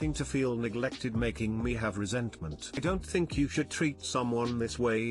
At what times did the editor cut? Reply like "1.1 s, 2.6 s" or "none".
2.8 s